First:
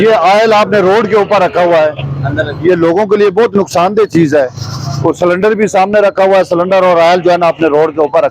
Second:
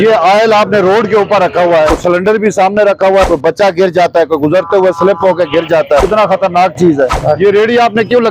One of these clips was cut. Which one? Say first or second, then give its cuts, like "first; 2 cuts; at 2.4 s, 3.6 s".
second; 4 cuts; at 2.0 s, 3.3 s, 6.0 s, 7.2 s